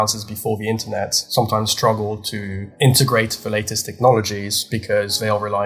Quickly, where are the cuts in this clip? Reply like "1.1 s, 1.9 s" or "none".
1.2 s, 2.6 s